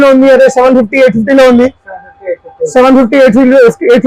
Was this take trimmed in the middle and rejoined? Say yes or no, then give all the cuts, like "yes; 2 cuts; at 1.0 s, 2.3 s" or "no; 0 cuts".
no; 0 cuts